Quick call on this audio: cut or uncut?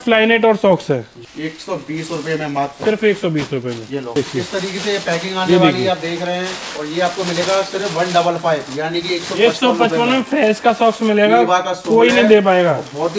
cut